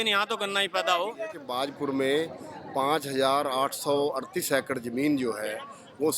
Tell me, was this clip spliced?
yes; 1 cut; at 1.4 s

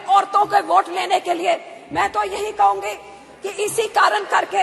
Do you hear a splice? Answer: no; 0 cuts

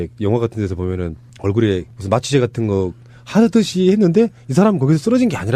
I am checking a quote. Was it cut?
yes; 1 cut; at 1.6 s

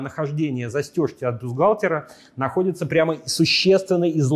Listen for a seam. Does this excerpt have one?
no; 0 cuts

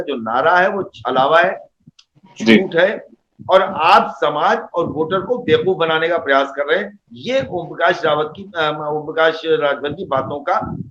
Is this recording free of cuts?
yes; 0 cuts

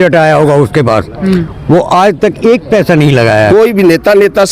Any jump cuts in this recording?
yes; 1 cut; at 3.5 s

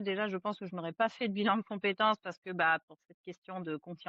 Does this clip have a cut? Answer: no; 0 cuts

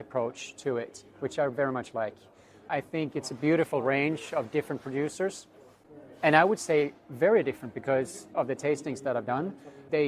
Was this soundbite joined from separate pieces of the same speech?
no; 0 cuts

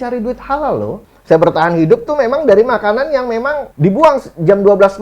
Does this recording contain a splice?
yes; 2 cuts; at 1.1 s, 3.6 s

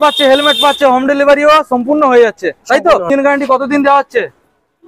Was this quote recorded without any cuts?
no; 1 cut; at 3.1 s

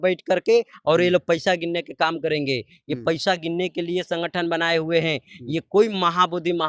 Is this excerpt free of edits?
yes; 0 cuts

